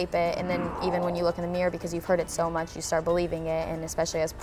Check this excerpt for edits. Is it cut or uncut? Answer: uncut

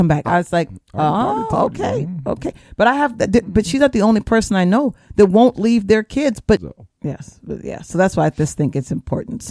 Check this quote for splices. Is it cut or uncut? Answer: cut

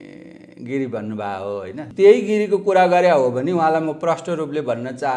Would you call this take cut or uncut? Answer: cut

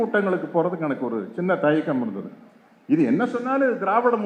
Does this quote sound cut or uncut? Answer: uncut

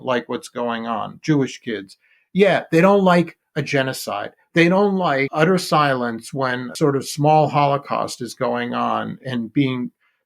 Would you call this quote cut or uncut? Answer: cut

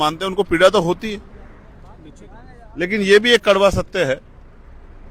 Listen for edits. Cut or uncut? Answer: uncut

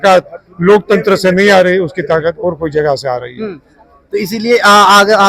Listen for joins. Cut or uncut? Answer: uncut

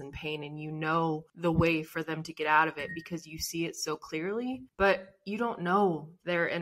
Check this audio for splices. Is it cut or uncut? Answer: cut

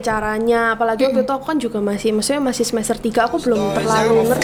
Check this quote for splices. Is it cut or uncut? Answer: uncut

